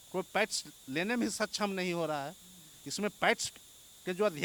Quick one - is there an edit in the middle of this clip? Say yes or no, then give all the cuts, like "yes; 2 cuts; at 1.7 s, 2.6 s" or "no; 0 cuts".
no; 0 cuts